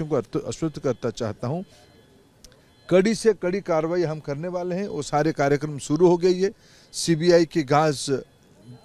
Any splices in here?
no; 0 cuts

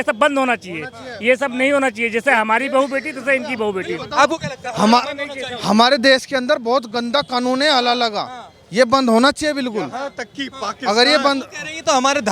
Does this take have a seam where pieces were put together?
no; 0 cuts

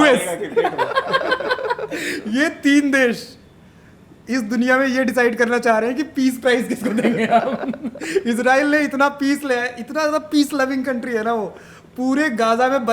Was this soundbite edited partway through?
no; 0 cuts

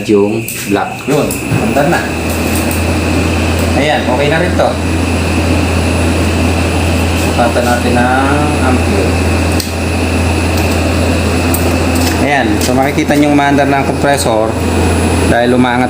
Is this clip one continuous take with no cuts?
no; 1 cut; at 1.0 s

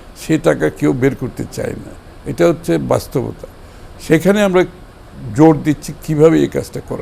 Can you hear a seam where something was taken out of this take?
no; 0 cuts

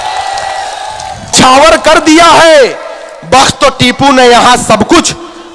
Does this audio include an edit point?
yes; 1 cut; at 1.3 s

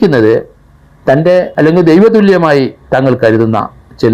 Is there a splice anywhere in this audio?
yes; 1 cut; at 1.5 s

